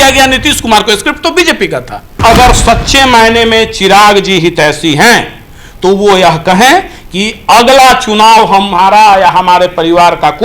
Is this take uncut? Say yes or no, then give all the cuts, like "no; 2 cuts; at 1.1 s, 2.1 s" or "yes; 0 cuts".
no; 1 cut; at 2.2 s